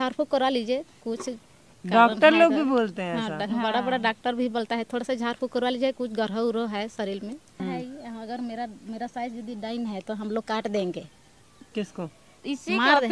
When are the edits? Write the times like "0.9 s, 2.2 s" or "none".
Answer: 7.5 s